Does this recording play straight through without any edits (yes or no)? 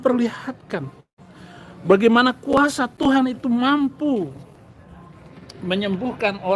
yes